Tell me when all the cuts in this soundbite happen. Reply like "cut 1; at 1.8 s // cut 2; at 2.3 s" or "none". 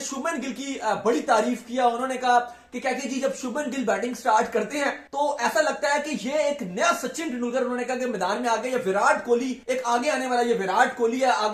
none